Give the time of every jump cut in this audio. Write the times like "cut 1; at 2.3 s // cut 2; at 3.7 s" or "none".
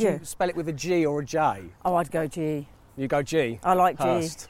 cut 1; at 1.7 s

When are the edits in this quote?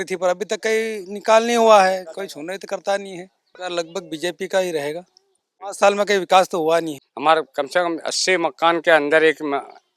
cut 1; at 3.5 s // cut 2; at 5.7 s // cut 3; at 7.0 s

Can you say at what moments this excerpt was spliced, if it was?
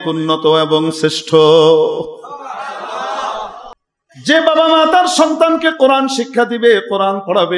cut 1; at 3.7 s

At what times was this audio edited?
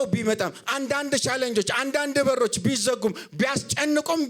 none

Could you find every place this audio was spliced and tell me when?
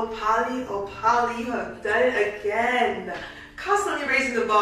none

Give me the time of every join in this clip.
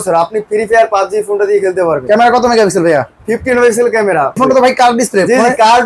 cut 1; at 4.4 s

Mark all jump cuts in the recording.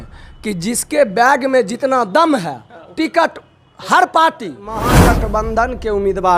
cut 1; at 4.9 s

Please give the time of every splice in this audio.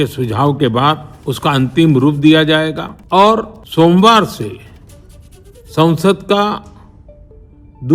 cut 1; at 1.1 s // cut 2; at 2.9 s // cut 3; at 3.6 s

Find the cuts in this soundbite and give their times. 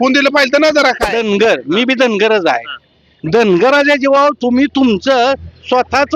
cut 1; at 1.1 s

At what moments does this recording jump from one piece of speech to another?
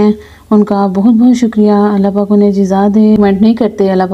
cut 1; at 3.2 s

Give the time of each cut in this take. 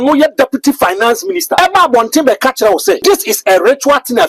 cut 1; at 1.6 s // cut 2; at 3.0 s

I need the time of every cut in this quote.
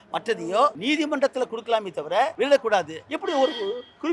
cut 1; at 0.8 s // cut 2; at 2.3 s // cut 3; at 3.0 s

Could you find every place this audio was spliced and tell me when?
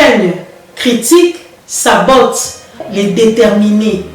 cut 1; at 2.9 s

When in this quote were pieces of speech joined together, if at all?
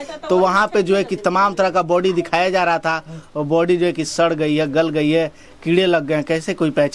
none

